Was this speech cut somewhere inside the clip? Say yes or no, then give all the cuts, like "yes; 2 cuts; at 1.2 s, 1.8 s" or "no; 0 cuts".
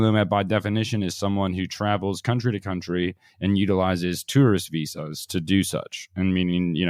no; 0 cuts